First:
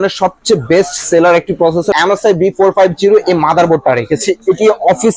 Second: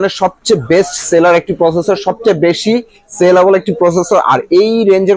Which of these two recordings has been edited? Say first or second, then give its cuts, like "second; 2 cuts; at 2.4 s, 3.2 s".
first; 1 cut; at 1.9 s